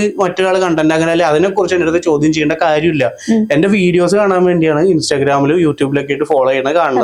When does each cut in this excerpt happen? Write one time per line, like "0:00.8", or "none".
none